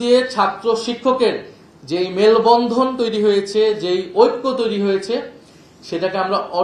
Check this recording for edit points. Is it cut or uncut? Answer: uncut